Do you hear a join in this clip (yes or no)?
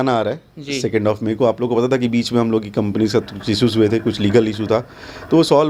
no